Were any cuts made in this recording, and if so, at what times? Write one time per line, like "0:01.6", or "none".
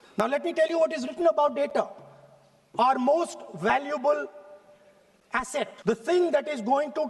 0:05.8